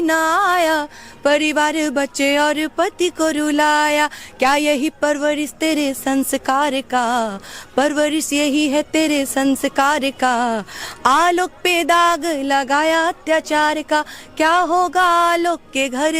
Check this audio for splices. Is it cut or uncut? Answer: uncut